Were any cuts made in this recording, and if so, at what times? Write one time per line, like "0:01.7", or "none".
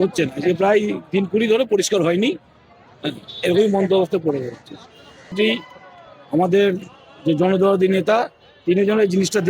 0:05.3